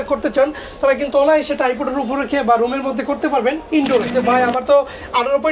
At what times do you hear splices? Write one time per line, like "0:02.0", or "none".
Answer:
0:04.1